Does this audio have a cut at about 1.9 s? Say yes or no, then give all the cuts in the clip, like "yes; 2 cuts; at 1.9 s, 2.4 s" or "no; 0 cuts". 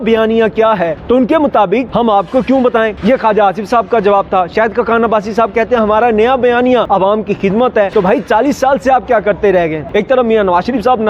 yes; 6 cuts; at 1.0 s, 1.9 s, 3.0 s, 6.9 s, 7.9 s, 9.8 s